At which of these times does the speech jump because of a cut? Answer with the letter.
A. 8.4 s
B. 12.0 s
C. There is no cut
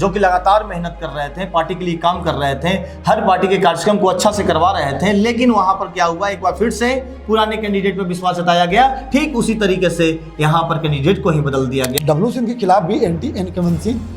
B